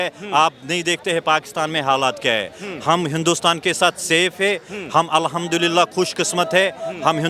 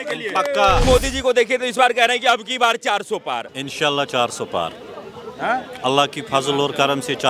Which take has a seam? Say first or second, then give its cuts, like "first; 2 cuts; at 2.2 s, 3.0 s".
second; 2 cuts; at 0.8 s, 3.6 s